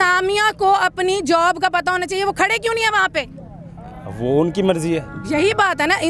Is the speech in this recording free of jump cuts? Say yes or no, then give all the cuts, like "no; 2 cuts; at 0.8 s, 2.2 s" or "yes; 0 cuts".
yes; 0 cuts